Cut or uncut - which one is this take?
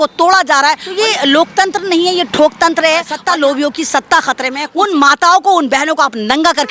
cut